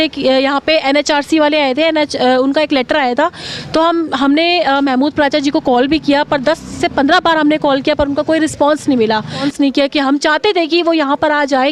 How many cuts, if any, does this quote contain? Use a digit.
1